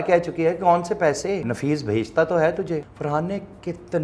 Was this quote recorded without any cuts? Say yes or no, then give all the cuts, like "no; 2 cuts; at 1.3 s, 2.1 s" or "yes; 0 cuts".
no; 2 cuts; at 1.5 s, 2.9 s